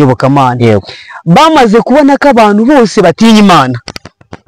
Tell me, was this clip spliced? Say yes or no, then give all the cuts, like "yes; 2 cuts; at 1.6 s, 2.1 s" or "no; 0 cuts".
no; 0 cuts